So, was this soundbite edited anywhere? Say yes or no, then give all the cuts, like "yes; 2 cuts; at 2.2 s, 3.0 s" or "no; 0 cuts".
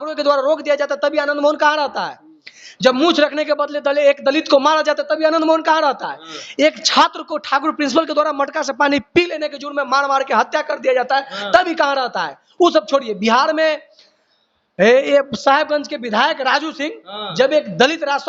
no; 0 cuts